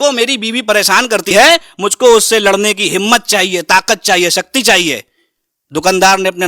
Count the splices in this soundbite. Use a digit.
1